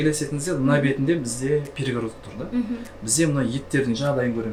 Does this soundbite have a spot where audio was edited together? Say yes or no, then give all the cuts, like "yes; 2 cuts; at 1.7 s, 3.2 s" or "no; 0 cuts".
no; 0 cuts